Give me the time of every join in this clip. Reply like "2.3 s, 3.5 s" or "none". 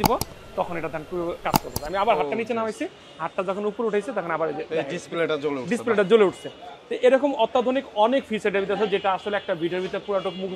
none